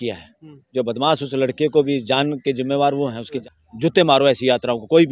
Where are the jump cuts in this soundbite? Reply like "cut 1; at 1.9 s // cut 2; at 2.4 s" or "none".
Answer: cut 1; at 3.5 s